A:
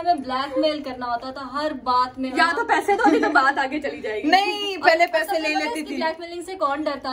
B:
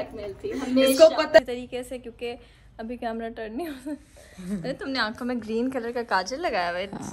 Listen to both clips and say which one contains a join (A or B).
B